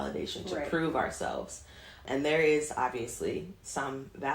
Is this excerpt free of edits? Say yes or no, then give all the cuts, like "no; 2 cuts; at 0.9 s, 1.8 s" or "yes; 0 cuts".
no; 1 cut; at 2.0 s